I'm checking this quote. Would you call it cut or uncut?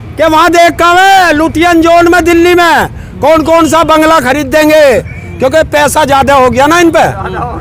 uncut